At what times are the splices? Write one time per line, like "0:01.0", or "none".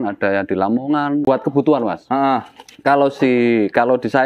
0:01.3

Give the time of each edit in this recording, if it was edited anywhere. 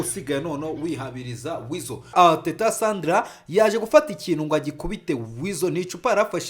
0:02.1

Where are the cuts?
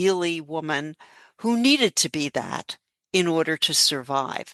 none

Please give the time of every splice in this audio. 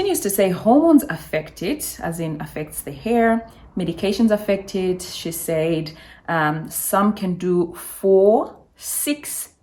none

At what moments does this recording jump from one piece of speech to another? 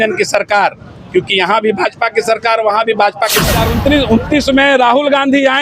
0:03.6

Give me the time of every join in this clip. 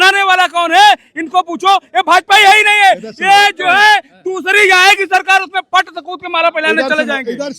none

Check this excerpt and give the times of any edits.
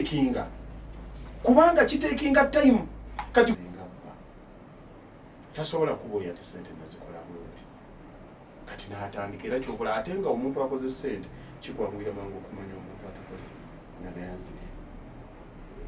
0:03.6

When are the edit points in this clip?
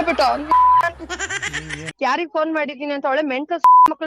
0:01.9

